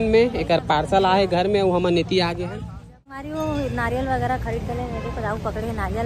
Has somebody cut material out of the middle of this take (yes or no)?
yes